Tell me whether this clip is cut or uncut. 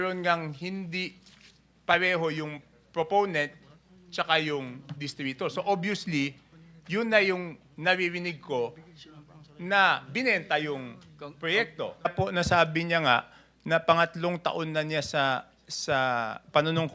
cut